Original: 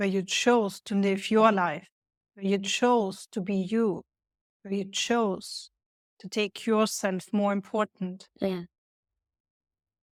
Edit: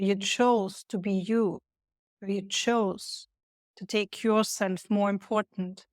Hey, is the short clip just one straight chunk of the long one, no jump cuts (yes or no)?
yes